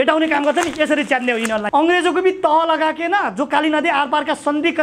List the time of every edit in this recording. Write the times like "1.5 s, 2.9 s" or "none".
1.6 s